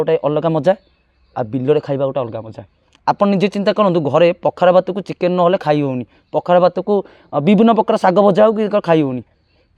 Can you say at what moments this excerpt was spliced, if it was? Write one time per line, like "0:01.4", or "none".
none